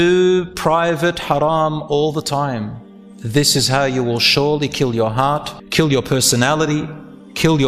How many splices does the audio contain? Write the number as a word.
one